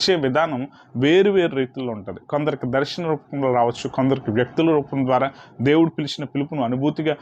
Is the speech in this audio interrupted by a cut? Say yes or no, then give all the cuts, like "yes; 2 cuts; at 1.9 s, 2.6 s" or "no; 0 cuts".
no; 0 cuts